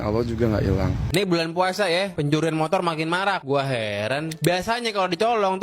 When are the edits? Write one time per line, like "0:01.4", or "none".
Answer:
0:01.0